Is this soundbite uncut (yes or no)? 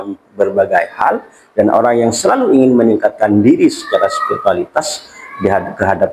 yes